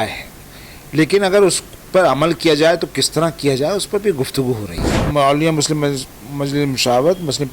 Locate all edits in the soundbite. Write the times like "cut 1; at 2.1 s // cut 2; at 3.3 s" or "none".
cut 1; at 5.0 s